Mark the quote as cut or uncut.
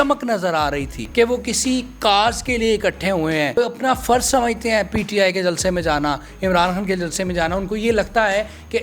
cut